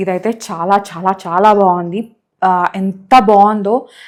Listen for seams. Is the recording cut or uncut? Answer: uncut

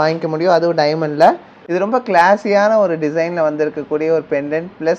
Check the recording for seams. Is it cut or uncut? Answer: uncut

